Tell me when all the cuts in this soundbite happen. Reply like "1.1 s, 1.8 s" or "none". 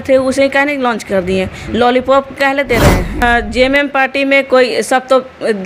3.2 s